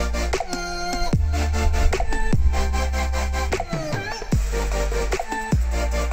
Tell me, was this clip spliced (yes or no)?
no